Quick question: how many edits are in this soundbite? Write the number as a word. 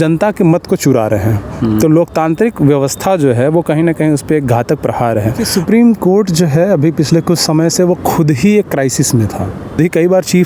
two